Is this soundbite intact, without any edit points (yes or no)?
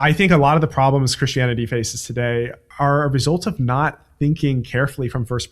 no